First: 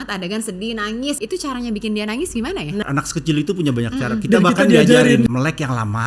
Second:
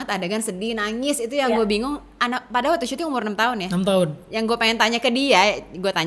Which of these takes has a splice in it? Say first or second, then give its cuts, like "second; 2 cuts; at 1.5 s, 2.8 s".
first; 3 cuts; at 1.2 s, 2.8 s, 5.3 s